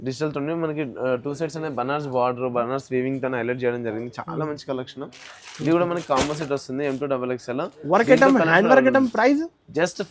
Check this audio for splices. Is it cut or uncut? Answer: uncut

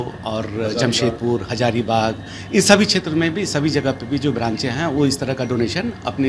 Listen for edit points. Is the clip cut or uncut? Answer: uncut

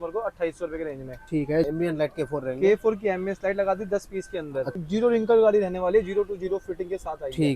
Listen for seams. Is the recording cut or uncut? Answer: cut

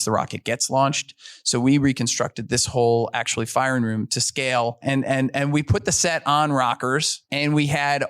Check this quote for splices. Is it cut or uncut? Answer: cut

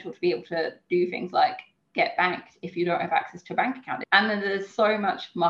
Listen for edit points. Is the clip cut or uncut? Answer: cut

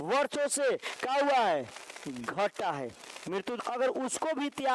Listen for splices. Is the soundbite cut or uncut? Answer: cut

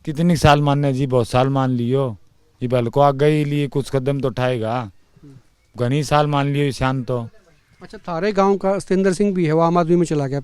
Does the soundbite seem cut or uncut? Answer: uncut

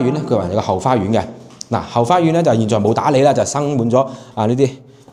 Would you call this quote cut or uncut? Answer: uncut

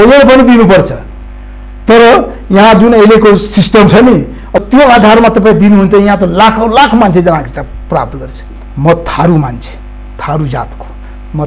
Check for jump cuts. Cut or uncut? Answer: cut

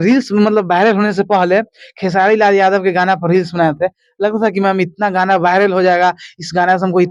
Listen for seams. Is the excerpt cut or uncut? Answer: uncut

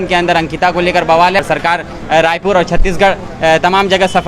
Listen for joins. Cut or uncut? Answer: cut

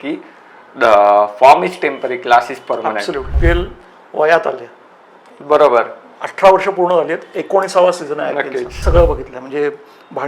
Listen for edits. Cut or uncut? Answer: cut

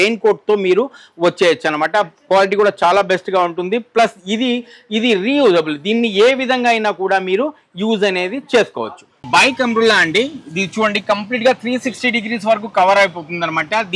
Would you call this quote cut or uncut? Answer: uncut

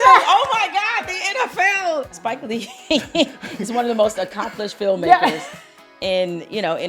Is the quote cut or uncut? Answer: cut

